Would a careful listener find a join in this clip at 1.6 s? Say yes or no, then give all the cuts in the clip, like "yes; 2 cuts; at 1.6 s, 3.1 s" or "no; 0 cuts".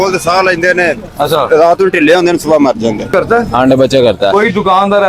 no; 1 cut; at 3.1 s